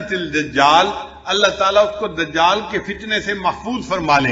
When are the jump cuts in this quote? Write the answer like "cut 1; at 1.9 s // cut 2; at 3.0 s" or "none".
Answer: none